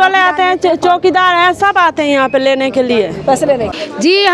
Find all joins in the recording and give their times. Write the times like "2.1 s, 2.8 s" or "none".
3.2 s